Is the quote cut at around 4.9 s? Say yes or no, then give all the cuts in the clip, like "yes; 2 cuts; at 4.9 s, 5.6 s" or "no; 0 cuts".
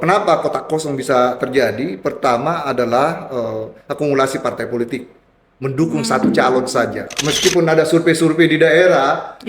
no; 1 cut; at 7.0 s